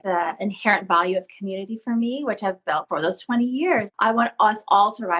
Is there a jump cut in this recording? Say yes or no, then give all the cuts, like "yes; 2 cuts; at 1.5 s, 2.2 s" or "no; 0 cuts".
yes; 2 cuts; at 2.8 s, 3.9 s